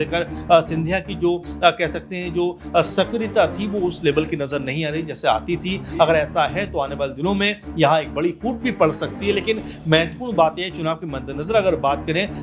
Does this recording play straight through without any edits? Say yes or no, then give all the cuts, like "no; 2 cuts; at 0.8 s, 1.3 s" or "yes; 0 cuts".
yes; 0 cuts